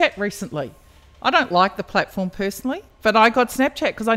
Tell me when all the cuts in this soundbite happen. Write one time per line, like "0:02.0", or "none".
none

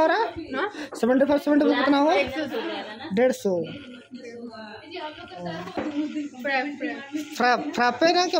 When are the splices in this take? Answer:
0:05.8

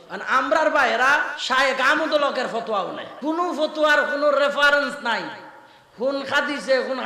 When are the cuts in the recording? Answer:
0:01.4
0:03.1

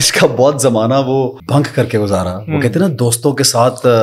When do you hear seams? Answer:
0:01.4

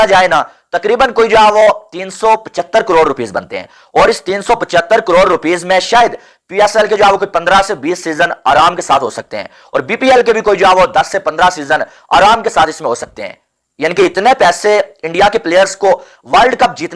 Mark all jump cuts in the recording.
none

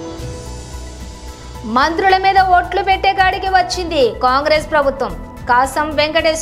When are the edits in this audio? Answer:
0:01.2

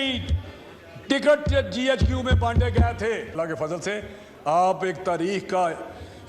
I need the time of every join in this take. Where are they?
0:03.3

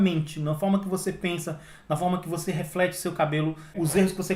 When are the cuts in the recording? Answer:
none

